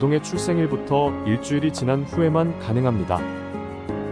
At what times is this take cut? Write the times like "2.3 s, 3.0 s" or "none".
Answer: 3.2 s

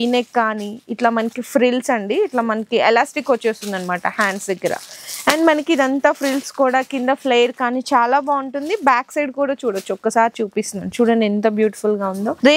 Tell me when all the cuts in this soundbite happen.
none

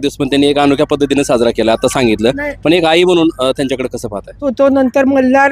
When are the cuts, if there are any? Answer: 4.5 s

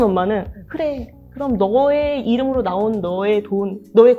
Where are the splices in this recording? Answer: none

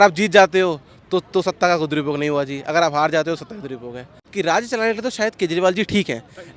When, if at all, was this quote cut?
4.2 s

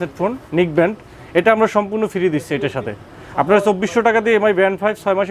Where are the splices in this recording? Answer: none

